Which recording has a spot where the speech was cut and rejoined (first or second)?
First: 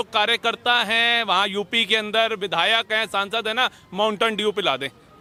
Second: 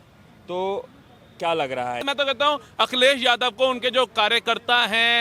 second